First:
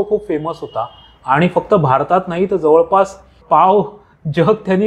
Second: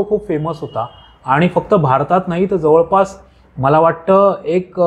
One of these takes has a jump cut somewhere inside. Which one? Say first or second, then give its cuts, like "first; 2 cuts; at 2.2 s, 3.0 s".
first; 1 cut; at 3.4 s